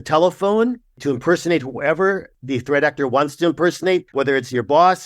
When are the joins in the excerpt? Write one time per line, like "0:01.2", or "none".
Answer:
0:02.4
0:04.1